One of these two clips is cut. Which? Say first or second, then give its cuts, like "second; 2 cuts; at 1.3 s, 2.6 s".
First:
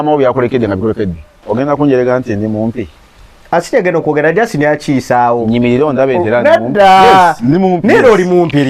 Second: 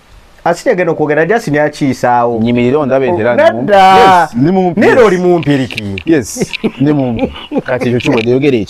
first; 1 cut; at 1.4 s